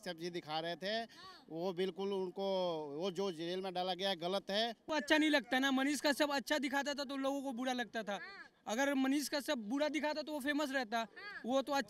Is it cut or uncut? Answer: cut